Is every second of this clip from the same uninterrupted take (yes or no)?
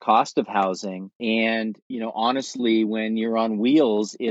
no